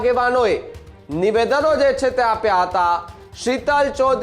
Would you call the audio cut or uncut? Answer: uncut